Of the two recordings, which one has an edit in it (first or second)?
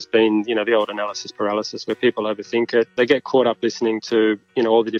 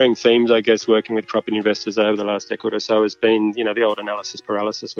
first